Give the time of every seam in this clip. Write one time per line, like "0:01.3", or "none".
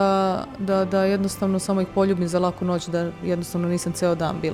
none